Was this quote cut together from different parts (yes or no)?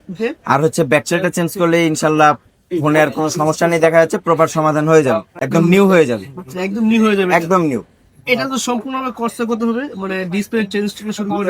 no